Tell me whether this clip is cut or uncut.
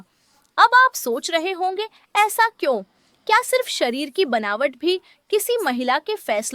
uncut